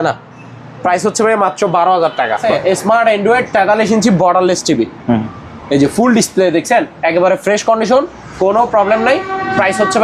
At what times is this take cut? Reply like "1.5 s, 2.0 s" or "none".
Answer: 2.4 s